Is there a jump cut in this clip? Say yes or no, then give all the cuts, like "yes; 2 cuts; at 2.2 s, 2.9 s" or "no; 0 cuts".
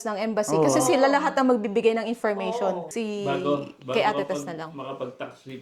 yes; 1 cut; at 2.9 s